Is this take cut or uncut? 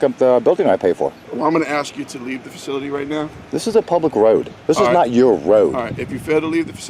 cut